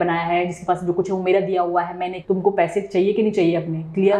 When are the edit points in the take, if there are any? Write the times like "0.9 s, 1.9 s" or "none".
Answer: 2.1 s